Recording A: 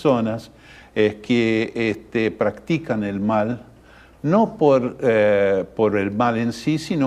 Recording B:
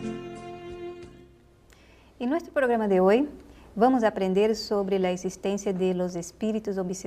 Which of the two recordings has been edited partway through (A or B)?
B